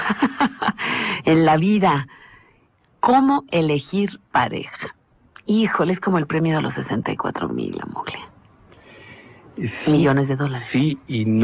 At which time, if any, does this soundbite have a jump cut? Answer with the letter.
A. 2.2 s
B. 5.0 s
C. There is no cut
C